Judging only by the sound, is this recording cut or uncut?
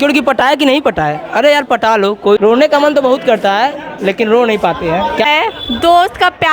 cut